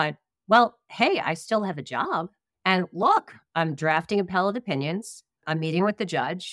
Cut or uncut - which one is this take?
uncut